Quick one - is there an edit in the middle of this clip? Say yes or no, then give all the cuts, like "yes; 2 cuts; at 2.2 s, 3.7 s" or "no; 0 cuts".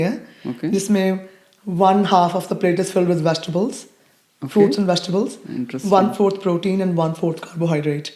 no; 0 cuts